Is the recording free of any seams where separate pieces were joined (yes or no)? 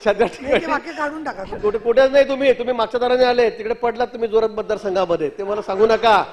no